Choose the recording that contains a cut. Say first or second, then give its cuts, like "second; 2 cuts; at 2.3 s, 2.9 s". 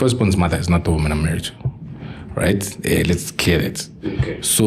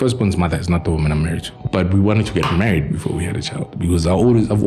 second; 1 cut; at 1.5 s